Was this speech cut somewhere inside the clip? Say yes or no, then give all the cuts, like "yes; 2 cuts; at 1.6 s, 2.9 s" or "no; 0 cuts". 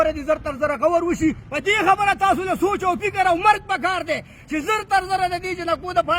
yes; 1 cut; at 1.5 s